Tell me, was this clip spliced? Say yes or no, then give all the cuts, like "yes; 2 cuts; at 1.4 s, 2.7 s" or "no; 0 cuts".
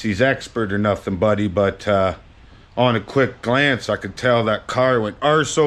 no; 0 cuts